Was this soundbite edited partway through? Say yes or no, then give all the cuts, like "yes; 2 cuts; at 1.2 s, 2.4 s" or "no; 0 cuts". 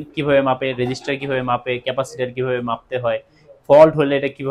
no; 0 cuts